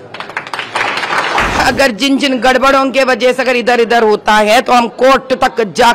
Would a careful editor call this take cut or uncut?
cut